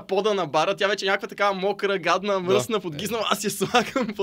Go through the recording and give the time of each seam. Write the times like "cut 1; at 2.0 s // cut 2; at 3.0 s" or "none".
none

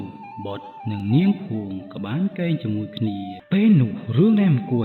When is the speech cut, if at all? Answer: cut 1; at 3.3 s

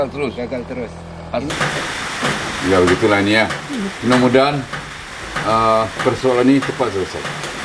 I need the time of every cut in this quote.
cut 1; at 1.5 s

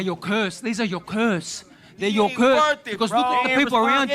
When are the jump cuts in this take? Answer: none

